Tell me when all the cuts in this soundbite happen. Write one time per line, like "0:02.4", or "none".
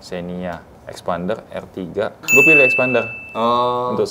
none